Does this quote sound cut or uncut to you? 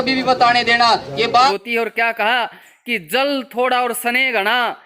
cut